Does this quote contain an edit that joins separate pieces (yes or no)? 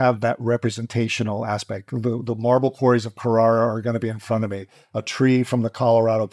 no